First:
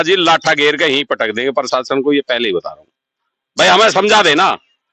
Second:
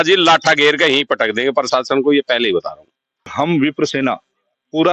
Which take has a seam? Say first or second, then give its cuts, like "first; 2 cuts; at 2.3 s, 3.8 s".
second; 1 cut; at 3.3 s